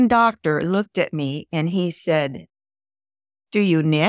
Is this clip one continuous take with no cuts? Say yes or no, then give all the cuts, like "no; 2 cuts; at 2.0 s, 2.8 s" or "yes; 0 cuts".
yes; 0 cuts